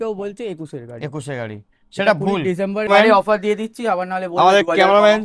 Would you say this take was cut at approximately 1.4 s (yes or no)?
no